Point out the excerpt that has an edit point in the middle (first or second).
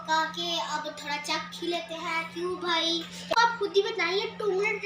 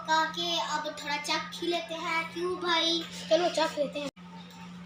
first